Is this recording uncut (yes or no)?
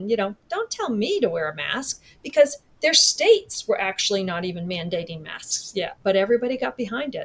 no